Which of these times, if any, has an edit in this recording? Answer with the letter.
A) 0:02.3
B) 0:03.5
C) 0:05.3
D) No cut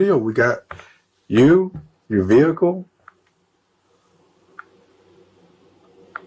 D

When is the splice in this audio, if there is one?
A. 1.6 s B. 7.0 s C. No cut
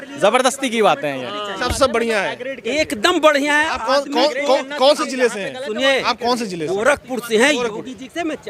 A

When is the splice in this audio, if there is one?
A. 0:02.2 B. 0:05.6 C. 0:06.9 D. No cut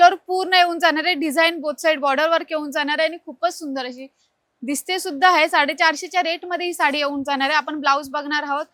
D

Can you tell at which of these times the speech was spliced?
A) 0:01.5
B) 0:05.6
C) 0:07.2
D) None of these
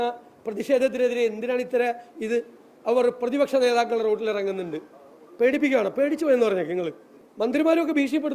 C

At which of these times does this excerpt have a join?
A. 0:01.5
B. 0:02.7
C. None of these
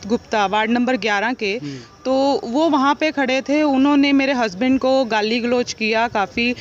C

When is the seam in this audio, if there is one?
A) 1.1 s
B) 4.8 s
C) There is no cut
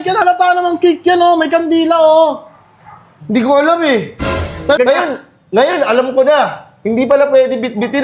B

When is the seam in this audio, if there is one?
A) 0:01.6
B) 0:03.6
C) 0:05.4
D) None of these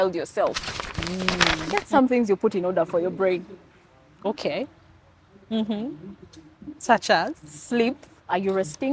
A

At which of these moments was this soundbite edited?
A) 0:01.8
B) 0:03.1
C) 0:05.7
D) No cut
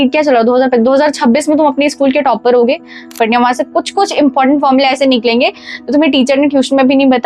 B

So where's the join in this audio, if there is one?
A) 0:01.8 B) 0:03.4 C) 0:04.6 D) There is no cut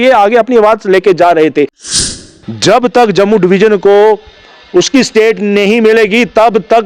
A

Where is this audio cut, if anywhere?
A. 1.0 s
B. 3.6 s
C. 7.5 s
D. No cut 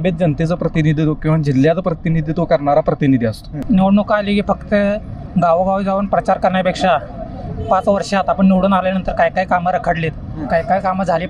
B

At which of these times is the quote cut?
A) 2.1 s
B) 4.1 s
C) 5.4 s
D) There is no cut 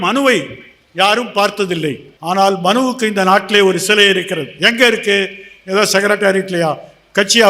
A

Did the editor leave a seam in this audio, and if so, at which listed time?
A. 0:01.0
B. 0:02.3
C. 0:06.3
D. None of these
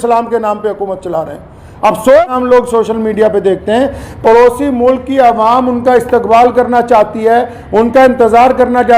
B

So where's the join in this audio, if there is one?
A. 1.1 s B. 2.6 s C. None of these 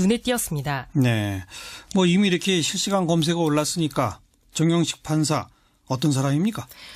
B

